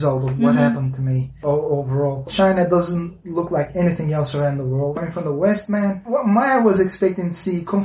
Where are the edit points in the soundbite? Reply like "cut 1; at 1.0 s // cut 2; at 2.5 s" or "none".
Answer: cut 1; at 1.4 s // cut 2; at 2.3 s // cut 3; at 4.9 s // cut 4; at 6.0 s